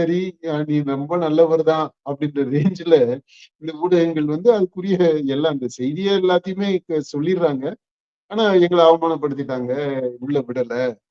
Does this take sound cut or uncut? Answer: uncut